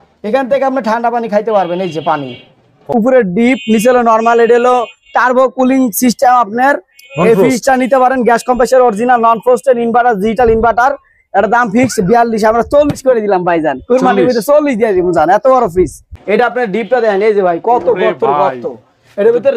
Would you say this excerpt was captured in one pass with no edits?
no; 2 cuts; at 2.8 s, 16.1 s

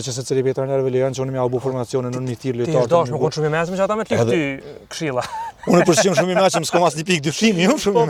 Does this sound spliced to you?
no; 0 cuts

